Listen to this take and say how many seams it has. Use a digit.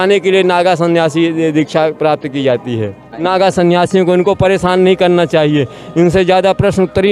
1